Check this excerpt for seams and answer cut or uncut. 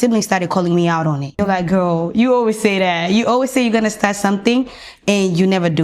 cut